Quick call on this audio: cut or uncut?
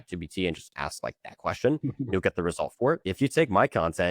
cut